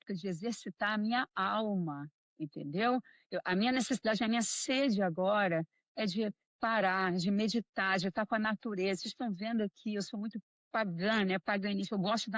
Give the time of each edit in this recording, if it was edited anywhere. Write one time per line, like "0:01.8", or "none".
none

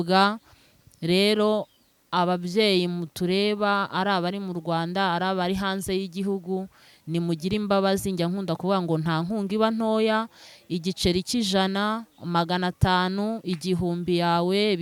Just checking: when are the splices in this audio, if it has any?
none

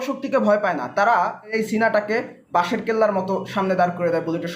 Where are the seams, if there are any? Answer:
0:01.5

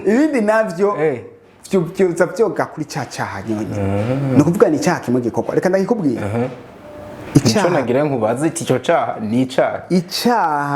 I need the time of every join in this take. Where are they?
none

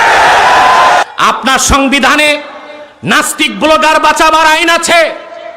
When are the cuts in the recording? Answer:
0:01.0

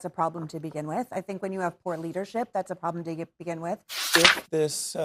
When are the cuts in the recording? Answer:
0:04.0

